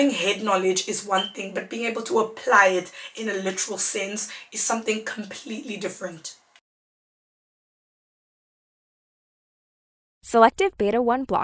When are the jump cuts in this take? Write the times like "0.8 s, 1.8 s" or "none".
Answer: none